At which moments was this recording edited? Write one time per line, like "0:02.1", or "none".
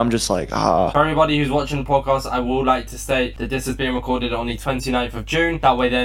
0:00.9